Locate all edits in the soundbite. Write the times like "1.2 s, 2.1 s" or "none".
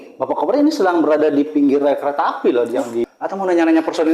3.1 s